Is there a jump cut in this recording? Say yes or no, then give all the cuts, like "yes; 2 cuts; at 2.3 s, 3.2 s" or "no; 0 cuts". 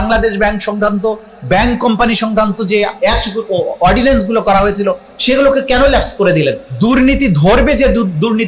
yes; 1 cut; at 6.7 s